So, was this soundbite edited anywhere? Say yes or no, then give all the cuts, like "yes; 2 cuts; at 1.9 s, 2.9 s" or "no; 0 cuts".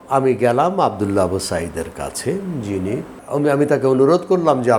yes; 1 cut; at 3.1 s